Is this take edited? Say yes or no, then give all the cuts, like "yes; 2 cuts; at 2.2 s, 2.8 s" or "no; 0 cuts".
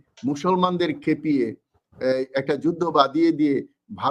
no; 0 cuts